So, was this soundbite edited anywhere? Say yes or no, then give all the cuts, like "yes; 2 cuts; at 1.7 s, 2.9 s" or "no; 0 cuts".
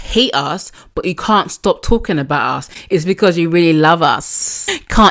no; 0 cuts